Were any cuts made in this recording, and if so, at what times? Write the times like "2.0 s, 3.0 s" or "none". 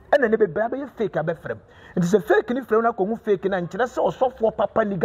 none